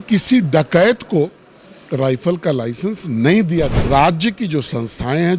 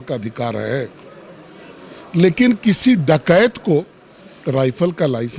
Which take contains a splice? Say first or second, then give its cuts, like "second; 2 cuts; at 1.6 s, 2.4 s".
first; 1 cut; at 3.8 s